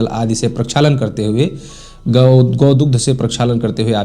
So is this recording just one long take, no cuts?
yes; 0 cuts

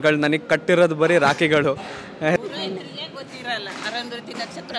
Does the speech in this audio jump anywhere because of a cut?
yes; 1 cut; at 2.4 s

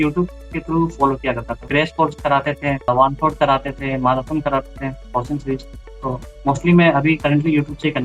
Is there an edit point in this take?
yes; 2 cuts; at 1.7 s, 2.9 s

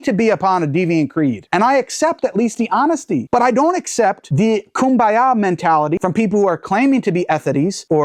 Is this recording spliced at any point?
no; 0 cuts

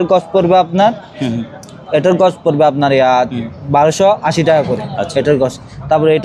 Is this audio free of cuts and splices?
yes; 0 cuts

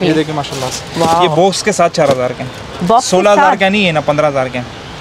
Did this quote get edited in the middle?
no; 0 cuts

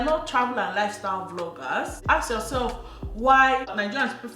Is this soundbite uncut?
no; 1 cut; at 1.9 s

